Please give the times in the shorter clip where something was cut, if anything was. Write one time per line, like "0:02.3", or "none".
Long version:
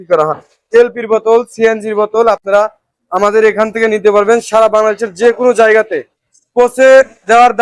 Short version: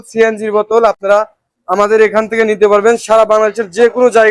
none